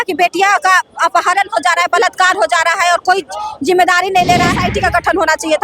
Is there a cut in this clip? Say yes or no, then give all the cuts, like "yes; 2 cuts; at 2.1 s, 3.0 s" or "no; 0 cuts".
yes; 1 cut; at 4.6 s